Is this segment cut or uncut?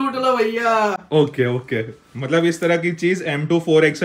uncut